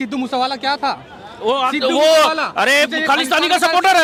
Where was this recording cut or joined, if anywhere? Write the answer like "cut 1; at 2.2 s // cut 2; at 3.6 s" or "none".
none